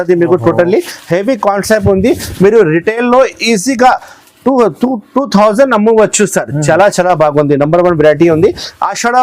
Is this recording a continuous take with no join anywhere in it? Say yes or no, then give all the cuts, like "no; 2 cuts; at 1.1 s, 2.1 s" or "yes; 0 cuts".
yes; 0 cuts